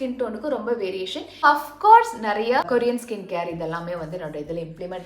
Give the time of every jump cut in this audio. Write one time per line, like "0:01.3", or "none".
0:01.4
0:02.7

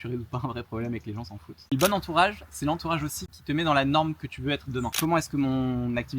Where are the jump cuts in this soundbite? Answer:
0:01.7
0:03.4
0:04.9

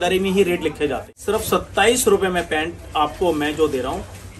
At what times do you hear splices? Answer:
0:01.1

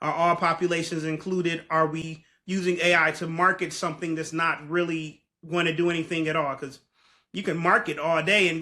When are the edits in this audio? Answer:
none

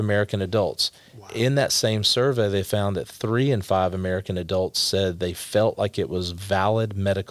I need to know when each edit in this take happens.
none

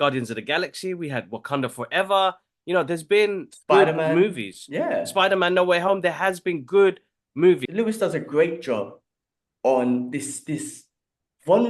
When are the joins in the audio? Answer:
0:07.7

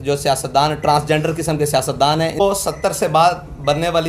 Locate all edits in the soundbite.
0:02.4

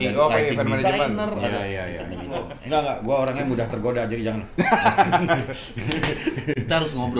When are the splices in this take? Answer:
0:02.6

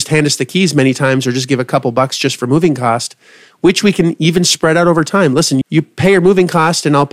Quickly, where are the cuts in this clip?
0:05.6

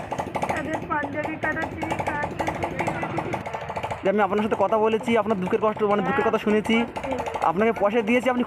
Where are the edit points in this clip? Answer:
0:03.4

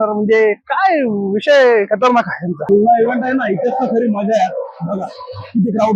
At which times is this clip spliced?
0:02.6

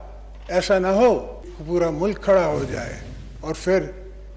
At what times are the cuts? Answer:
0:01.5

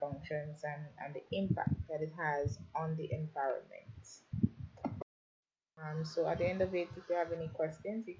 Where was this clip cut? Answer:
0:05.1

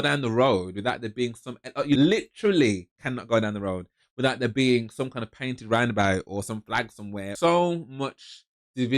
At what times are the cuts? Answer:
0:02.0
0:07.3

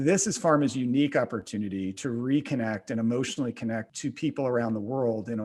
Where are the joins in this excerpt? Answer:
0:03.9

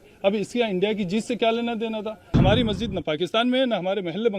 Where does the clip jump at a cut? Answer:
0:02.4

